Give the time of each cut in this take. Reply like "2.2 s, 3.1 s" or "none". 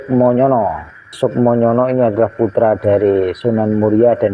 1.1 s